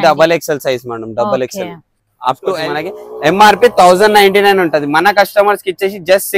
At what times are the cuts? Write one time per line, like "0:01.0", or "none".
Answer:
0:02.6